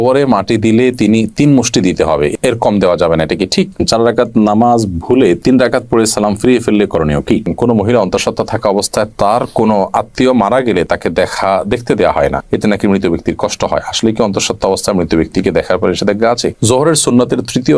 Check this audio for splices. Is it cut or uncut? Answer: cut